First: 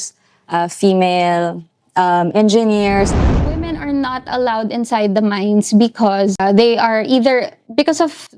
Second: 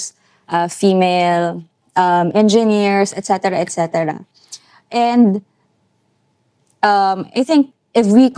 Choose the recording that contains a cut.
first; 2 cuts; at 3.2 s, 6.4 s

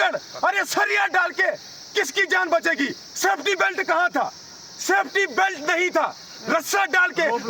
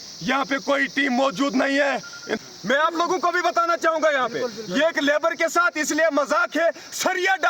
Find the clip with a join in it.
second; 1 cut; at 2.4 s

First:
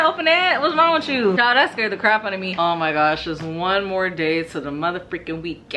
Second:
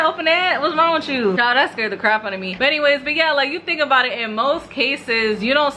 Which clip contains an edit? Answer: first; 1 cut; at 2.5 s

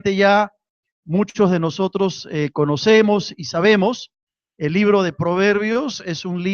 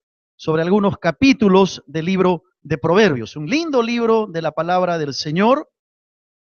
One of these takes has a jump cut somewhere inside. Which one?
first; 1 cut; at 1.3 s

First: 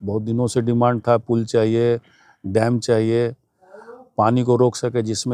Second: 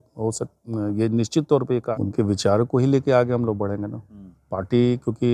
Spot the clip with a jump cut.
second; 1 cut; at 1.9 s

